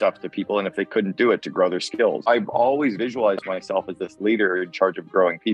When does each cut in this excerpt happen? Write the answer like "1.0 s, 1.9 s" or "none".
2.3 s